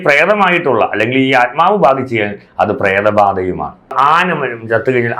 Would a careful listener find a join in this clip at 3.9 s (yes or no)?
yes